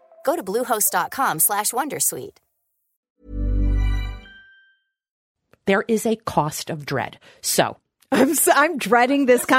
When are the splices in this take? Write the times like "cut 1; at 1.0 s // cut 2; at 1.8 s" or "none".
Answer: cut 1; at 5.2 s